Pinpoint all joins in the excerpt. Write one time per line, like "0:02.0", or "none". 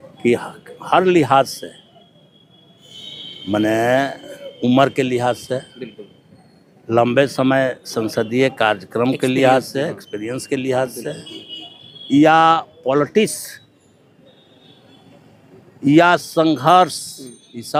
none

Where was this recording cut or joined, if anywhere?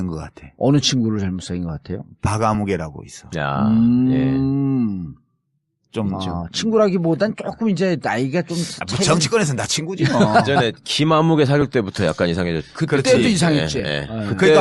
none

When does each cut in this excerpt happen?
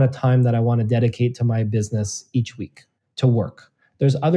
none

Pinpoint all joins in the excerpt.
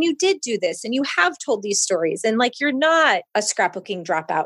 0:03.3

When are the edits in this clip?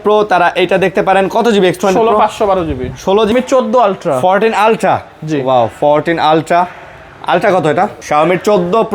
0:03.3
0:08.0

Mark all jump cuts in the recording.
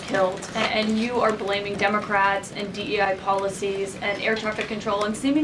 0:02.0

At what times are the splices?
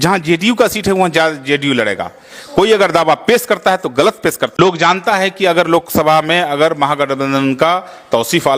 0:04.5

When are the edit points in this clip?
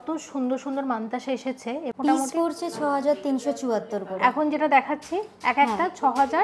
0:01.9

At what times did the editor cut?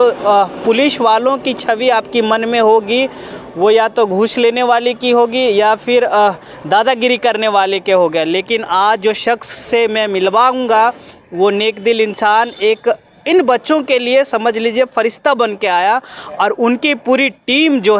none

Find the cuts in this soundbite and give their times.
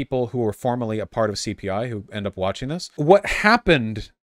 0:02.8

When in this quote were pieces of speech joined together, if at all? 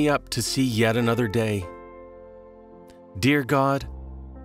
0:01.6
0:03.1

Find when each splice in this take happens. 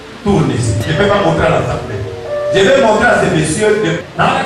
none

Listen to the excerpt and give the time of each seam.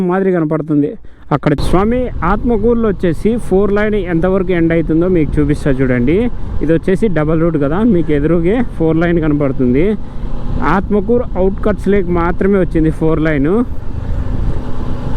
0:01.6

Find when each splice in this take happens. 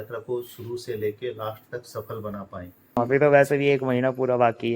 0:03.0

